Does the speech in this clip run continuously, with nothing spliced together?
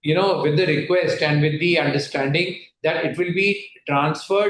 yes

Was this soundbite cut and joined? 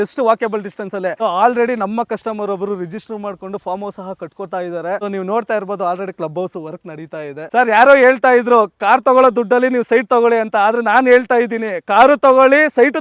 yes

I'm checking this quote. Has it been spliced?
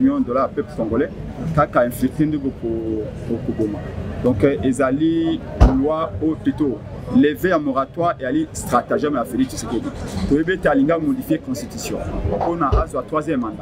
no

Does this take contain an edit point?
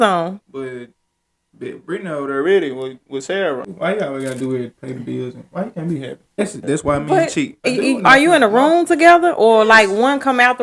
yes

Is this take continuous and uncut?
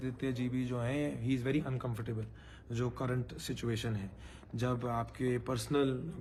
yes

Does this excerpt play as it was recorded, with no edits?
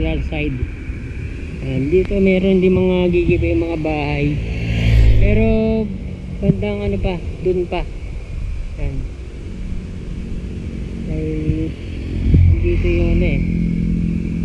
yes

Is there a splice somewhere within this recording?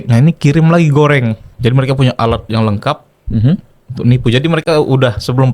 yes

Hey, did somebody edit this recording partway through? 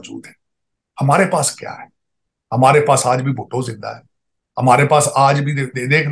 no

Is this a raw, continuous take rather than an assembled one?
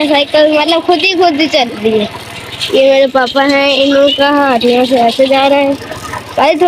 yes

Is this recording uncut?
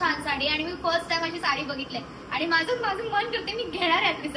yes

